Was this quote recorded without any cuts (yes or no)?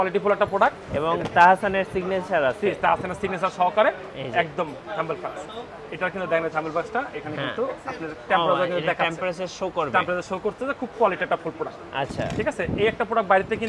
yes